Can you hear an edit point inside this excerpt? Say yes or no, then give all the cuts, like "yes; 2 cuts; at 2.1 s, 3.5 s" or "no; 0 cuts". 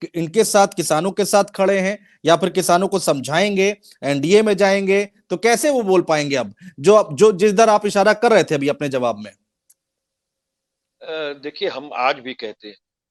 no; 0 cuts